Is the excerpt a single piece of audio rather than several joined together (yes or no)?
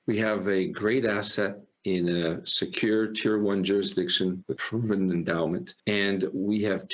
yes